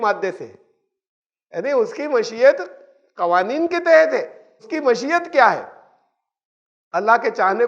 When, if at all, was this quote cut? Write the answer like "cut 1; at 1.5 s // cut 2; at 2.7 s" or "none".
cut 1; at 4.7 s